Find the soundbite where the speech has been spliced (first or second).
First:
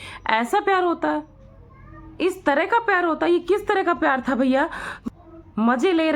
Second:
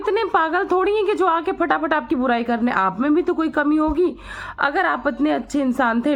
first